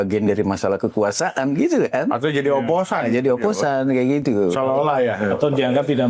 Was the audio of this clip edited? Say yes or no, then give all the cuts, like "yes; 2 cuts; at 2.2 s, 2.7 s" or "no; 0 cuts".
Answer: no; 0 cuts